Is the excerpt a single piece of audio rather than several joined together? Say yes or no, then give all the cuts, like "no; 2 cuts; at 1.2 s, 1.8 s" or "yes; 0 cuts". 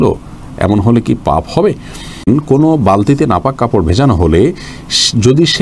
no; 1 cut; at 2.2 s